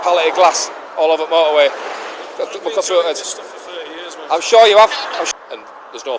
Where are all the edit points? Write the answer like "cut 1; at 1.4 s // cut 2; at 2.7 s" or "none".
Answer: cut 1; at 5.1 s